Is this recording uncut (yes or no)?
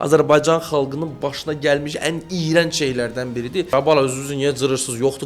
no